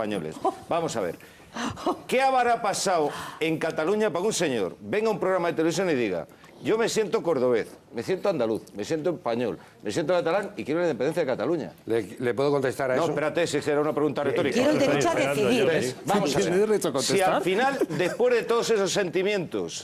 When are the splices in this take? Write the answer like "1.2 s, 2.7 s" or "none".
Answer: 18.8 s